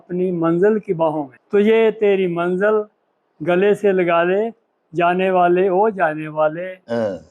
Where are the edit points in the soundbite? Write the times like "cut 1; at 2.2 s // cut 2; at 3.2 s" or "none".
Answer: cut 1; at 1.3 s